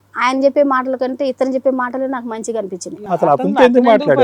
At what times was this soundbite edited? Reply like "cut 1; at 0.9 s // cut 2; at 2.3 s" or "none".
cut 1; at 3.0 s